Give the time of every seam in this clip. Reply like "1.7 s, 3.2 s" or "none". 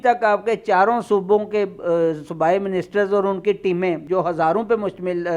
4.0 s